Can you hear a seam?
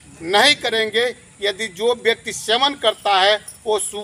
no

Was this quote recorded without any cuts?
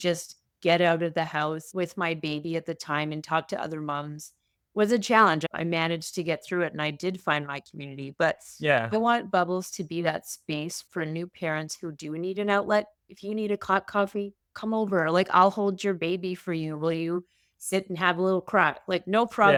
yes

